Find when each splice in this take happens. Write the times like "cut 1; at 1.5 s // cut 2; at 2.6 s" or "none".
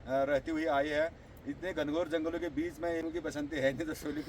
cut 1; at 3.0 s

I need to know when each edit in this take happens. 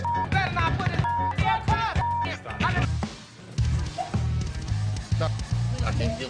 cut 1; at 2.9 s

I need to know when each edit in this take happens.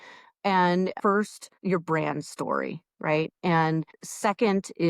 cut 1; at 0.9 s // cut 2; at 3.9 s

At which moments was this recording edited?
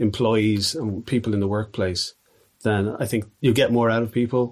cut 1; at 3.3 s

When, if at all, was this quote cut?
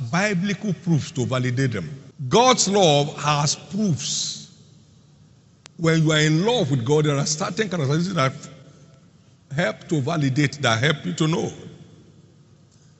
cut 1; at 2.2 s

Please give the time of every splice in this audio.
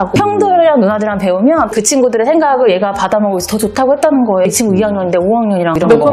none

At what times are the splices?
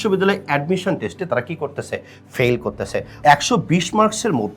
cut 1; at 3.1 s

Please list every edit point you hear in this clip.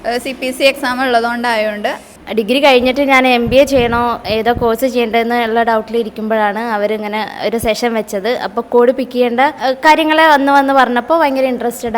cut 1; at 2.2 s // cut 2; at 9.6 s

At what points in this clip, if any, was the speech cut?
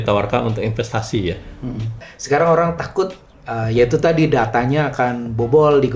cut 1; at 2.1 s

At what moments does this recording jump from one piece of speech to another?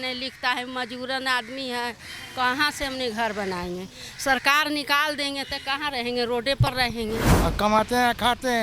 cut 1; at 7.3 s

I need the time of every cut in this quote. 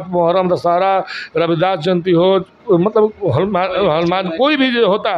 none

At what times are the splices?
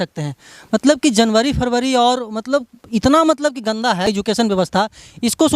cut 1; at 4.0 s

